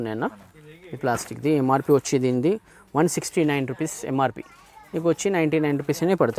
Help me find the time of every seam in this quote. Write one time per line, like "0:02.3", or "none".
none